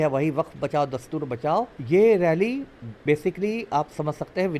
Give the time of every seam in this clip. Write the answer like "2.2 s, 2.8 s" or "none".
1.8 s